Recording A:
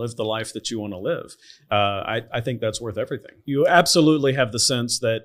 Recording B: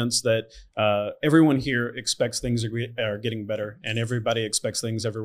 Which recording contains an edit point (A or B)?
A